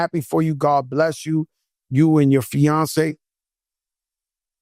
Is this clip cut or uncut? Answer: uncut